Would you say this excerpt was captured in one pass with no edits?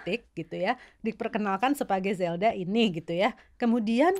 yes; 0 cuts

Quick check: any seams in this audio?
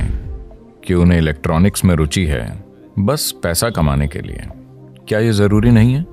no; 0 cuts

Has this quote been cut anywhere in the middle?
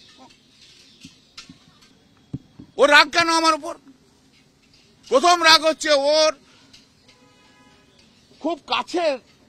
yes; 1 cut; at 1.7 s

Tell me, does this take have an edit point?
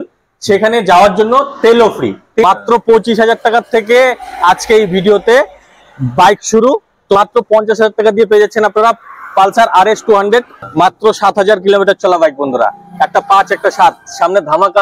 yes; 3 cuts; at 2.4 s, 7.2 s, 10.6 s

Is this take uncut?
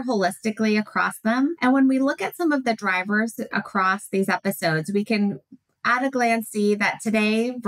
no; 1 cut; at 1.6 s

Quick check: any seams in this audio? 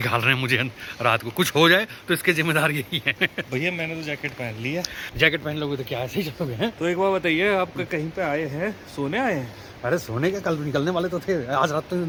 no; 0 cuts

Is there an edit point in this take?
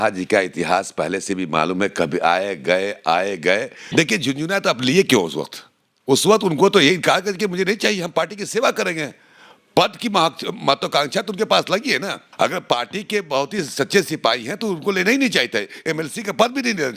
yes; 2 cuts; at 3.8 s, 12.2 s

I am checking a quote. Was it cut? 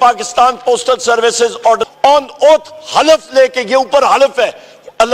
yes; 1 cut; at 1.8 s

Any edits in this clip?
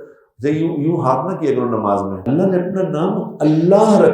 yes; 1 cut; at 2.2 s

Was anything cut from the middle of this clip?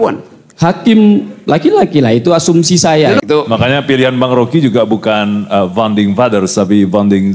yes; 1 cut; at 3.2 s

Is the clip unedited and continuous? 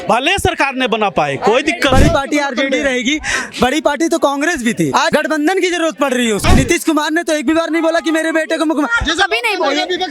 no; 3 cuts; at 1.9 s, 5.0 s, 6.4 s

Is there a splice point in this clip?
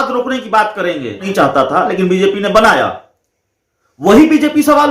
yes; 1 cut; at 1.3 s

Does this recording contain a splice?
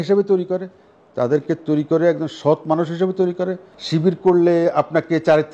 yes; 1 cut; at 3.7 s

